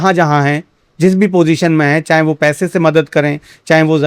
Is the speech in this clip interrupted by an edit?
no; 0 cuts

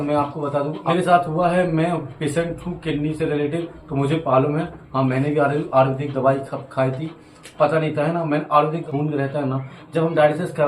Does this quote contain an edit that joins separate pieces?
yes; 2 cuts; at 0.8 s, 8.8 s

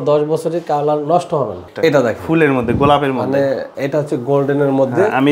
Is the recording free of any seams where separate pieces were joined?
no; 2 cuts; at 1.6 s, 3.7 s

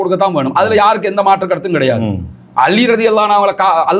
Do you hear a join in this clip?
no; 0 cuts

